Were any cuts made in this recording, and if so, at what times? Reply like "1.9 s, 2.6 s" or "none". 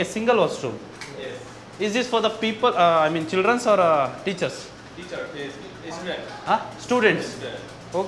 none